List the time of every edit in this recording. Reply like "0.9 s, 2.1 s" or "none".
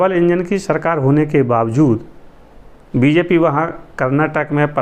none